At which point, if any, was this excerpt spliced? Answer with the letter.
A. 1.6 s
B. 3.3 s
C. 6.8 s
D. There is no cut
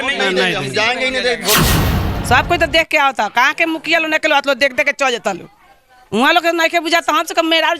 A